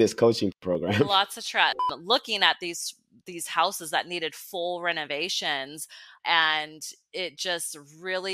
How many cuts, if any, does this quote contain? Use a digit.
1